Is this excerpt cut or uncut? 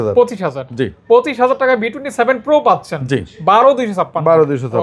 uncut